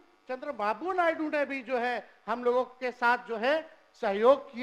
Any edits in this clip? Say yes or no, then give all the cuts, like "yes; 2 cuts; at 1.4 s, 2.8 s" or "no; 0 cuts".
no; 0 cuts